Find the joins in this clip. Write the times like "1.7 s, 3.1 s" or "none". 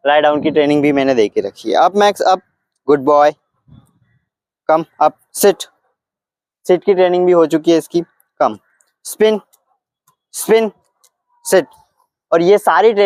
none